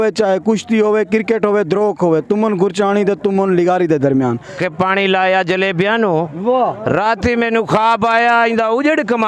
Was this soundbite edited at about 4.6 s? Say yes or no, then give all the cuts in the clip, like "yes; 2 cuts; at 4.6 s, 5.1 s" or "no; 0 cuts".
yes; 1 cut; at 4.6 s